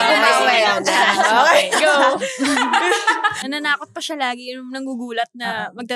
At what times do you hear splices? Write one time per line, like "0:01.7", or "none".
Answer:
0:03.5